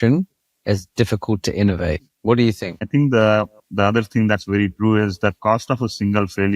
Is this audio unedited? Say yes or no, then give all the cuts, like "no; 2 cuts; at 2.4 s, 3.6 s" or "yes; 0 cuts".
no; 3 cuts; at 2.1 s, 2.9 s, 3.6 s